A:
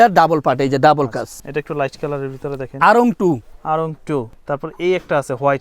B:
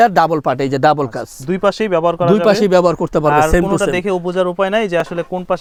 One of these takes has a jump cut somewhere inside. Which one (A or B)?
A